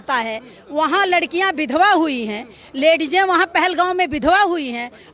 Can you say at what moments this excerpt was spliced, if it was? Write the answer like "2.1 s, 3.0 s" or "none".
none